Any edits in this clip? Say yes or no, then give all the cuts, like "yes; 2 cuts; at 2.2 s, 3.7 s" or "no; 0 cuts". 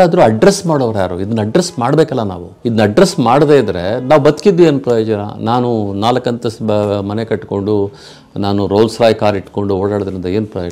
yes; 1 cut; at 2.4 s